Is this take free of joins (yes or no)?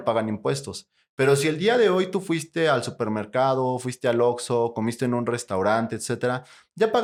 yes